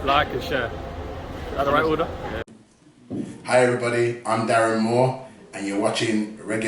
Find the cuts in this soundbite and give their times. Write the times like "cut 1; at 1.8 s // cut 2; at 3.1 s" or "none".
cut 1; at 2.5 s